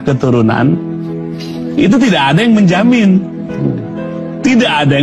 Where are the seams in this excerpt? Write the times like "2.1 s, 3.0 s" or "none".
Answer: none